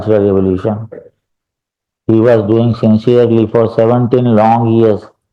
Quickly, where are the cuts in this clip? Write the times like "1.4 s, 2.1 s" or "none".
none